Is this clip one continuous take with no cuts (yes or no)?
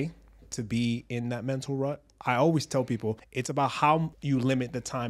no